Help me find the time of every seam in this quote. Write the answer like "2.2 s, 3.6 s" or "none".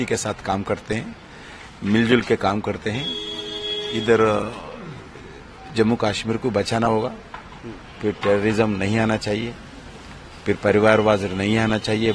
none